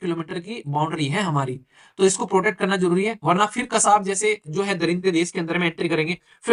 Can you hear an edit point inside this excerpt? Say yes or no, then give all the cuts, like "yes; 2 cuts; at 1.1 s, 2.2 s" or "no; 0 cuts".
no; 0 cuts